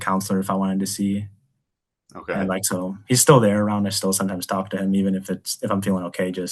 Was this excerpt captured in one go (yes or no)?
yes